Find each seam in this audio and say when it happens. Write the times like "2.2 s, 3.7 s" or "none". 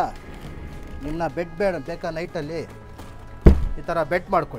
none